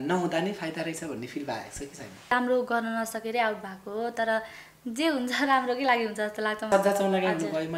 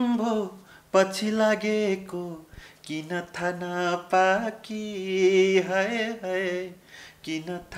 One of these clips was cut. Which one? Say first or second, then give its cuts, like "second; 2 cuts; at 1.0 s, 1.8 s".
first; 2 cuts; at 2.3 s, 6.7 s